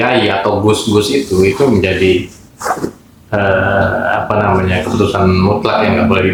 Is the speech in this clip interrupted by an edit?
no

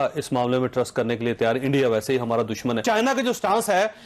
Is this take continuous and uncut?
no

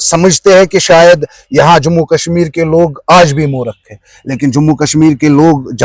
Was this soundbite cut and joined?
no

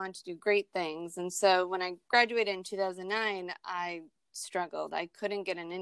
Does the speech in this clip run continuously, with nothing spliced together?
yes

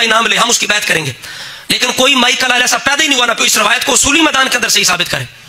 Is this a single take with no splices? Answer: no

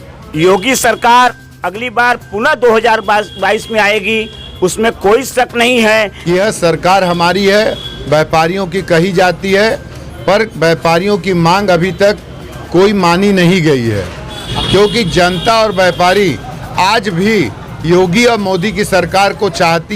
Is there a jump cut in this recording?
yes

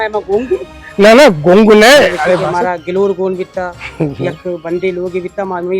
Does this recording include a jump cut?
yes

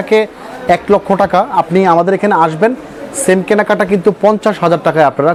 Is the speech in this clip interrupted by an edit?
no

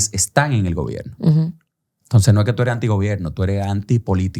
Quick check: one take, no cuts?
yes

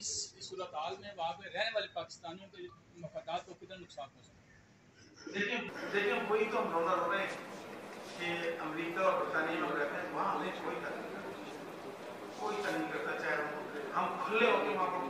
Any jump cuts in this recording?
no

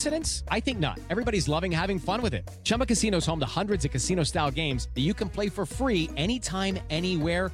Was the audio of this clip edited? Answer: no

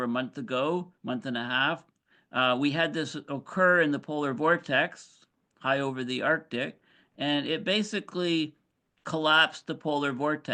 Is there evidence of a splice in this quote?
no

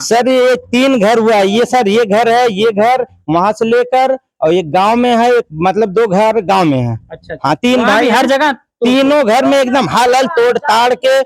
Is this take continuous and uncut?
yes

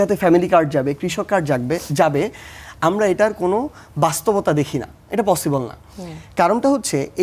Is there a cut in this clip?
no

